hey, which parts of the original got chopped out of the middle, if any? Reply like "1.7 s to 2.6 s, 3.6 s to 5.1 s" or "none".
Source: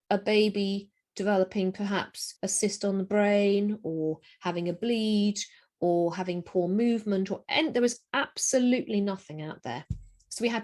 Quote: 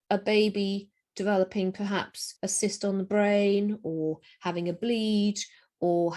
none